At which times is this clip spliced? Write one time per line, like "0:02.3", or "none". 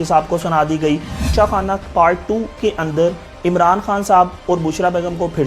0:01.3